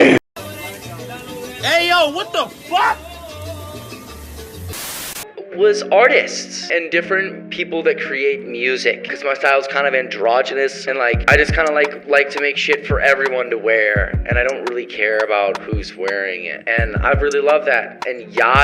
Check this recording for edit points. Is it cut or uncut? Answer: uncut